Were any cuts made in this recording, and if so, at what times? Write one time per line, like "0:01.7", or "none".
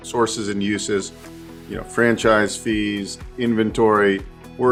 none